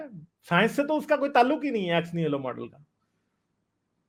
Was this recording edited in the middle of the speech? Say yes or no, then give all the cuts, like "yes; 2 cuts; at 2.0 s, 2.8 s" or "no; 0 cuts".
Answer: no; 0 cuts